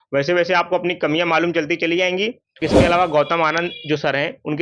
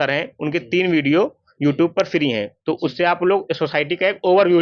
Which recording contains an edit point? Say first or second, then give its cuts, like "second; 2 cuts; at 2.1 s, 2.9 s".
first; 1 cut; at 2.6 s